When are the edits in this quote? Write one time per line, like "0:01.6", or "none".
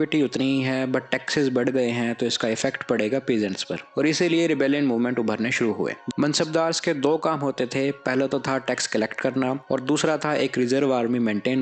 0:06.0